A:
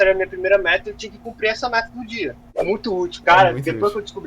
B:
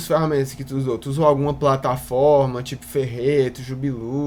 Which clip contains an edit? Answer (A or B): A